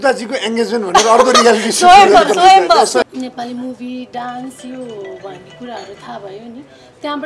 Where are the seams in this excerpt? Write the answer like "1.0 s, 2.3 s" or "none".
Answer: 3.0 s

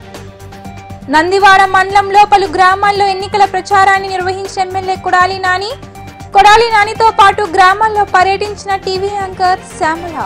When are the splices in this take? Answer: 1.0 s

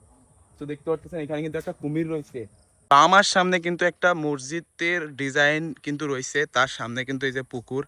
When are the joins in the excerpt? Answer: 2.8 s

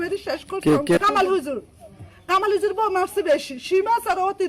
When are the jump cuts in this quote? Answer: 1.0 s

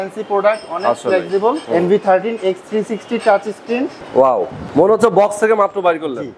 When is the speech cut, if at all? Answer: 1.6 s, 4.0 s, 4.6 s

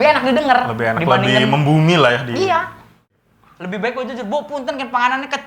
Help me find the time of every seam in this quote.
3.0 s

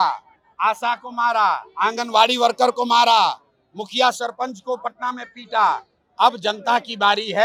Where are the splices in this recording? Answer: none

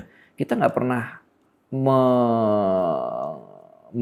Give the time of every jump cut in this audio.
none

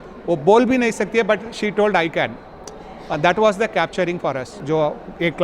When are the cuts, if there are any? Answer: 4.5 s

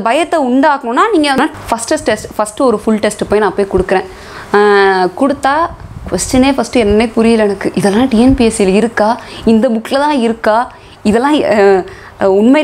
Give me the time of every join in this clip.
1.4 s

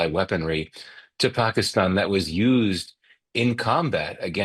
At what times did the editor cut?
none

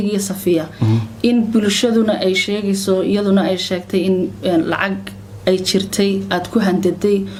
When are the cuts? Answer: none

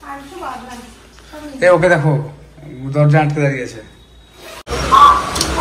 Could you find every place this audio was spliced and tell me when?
4.7 s

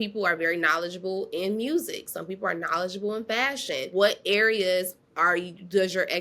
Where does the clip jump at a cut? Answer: 3.9 s

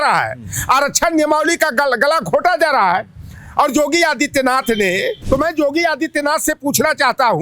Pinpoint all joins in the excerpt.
5.2 s

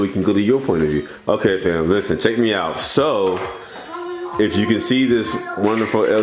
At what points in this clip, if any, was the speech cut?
none

